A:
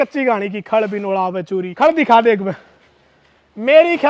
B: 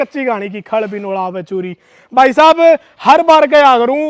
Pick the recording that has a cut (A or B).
A